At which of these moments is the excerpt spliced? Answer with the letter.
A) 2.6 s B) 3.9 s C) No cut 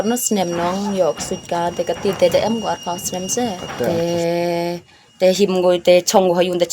B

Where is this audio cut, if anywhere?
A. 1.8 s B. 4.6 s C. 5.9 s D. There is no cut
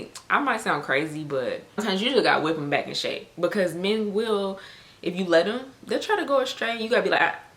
A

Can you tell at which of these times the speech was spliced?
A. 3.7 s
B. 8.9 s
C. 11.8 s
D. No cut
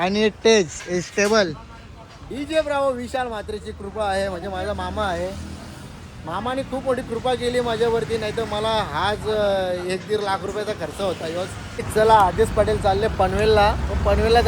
C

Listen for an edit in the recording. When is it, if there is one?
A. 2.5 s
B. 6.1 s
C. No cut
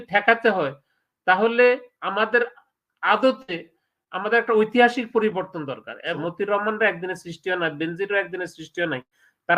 B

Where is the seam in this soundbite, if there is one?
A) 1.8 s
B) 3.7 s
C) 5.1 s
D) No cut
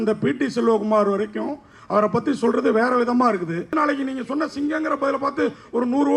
B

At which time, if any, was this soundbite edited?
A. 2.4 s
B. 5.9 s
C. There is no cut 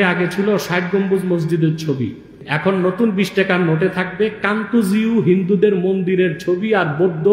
A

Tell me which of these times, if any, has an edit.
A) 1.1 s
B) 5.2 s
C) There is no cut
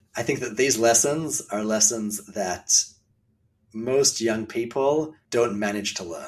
B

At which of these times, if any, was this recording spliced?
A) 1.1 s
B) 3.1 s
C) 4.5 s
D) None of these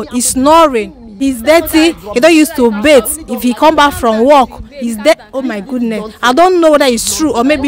A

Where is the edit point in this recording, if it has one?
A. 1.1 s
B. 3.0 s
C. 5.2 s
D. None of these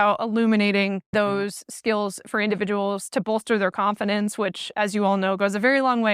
A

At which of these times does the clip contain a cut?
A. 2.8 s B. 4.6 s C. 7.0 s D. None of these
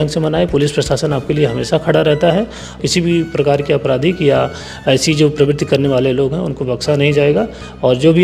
A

